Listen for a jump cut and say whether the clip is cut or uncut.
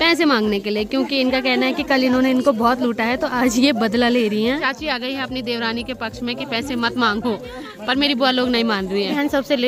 uncut